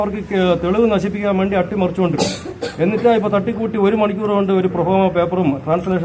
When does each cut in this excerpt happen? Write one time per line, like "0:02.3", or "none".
none